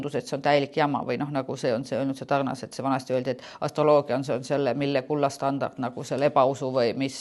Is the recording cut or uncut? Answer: uncut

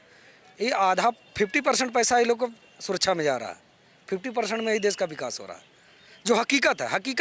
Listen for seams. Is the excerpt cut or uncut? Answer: uncut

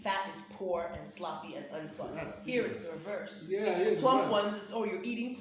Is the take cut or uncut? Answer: uncut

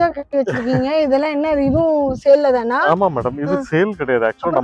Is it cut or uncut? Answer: uncut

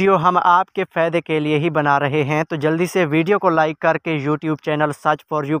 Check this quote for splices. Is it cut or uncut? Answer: uncut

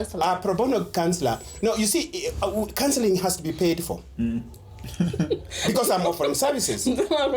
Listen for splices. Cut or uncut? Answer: uncut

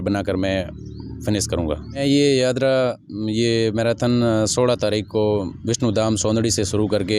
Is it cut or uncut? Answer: cut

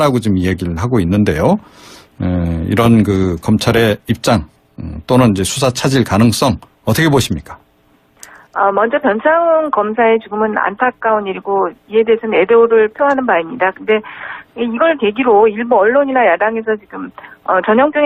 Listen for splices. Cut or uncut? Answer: cut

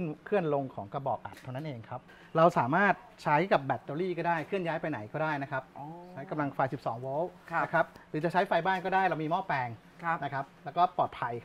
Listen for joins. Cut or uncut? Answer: cut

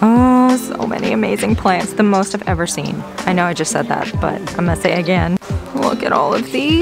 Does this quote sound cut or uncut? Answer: cut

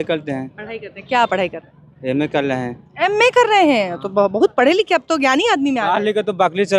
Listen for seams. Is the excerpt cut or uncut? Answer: uncut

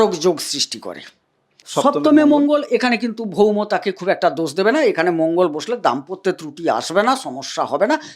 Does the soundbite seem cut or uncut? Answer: cut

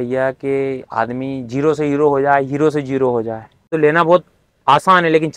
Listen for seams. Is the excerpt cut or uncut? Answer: cut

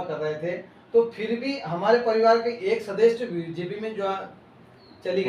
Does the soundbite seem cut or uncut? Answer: uncut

